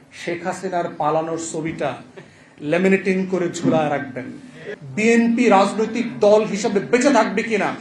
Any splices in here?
yes; 1 cut; at 4.6 s

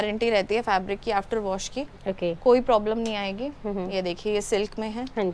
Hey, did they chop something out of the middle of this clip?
no; 0 cuts

